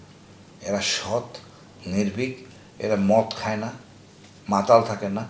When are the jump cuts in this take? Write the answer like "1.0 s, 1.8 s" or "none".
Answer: none